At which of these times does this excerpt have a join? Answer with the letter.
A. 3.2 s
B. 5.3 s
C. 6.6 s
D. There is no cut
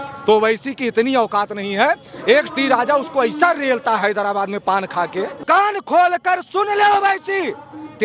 B